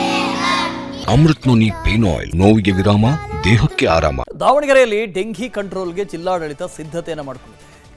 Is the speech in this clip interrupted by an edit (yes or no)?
yes